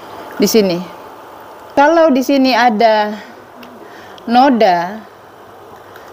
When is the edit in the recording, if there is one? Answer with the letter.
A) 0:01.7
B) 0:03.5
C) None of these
A